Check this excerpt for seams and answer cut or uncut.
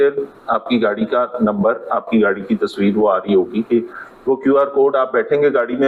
uncut